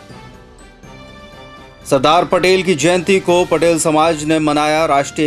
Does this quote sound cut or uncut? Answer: uncut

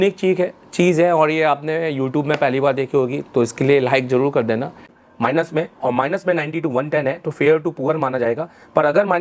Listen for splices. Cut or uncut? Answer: cut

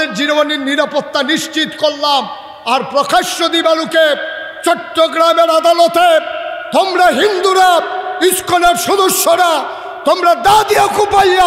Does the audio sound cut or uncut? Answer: uncut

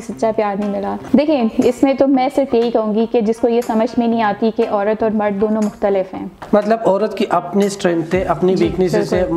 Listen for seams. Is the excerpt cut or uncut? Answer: cut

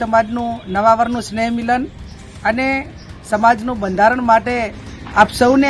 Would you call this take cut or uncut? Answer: uncut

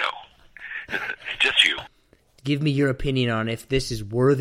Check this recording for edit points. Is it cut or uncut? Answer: cut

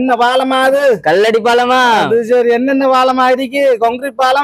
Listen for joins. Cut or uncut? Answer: uncut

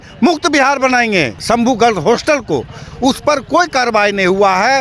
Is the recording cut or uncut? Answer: cut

